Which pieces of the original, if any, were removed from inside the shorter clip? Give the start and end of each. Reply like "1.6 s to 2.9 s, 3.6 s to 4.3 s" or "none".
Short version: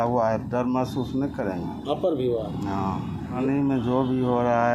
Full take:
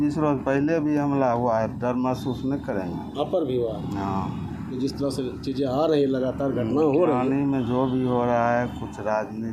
4.7 s to 7.2 s